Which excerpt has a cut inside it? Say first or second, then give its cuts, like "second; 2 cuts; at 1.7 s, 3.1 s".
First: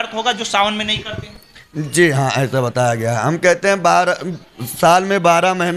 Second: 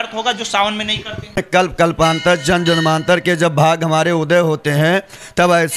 second; 1 cut; at 1.4 s